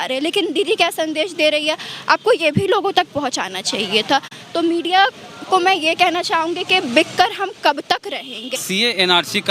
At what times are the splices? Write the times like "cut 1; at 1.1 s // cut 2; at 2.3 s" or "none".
cut 1; at 8.5 s

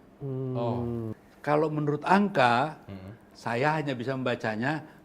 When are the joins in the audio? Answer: cut 1; at 1.2 s

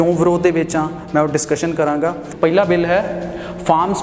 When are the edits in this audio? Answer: cut 1; at 2.2 s

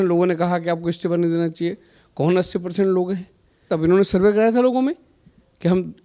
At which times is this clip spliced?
cut 1; at 3.6 s

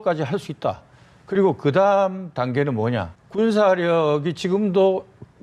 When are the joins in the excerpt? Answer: cut 1; at 3.2 s

